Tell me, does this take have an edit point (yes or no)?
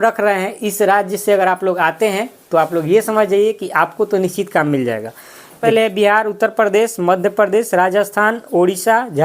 yes